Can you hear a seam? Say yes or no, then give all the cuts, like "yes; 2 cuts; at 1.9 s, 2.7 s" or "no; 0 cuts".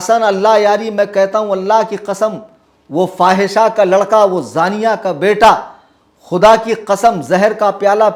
no; 0 cuts